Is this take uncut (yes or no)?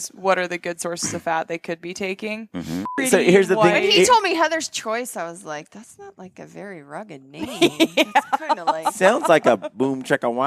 no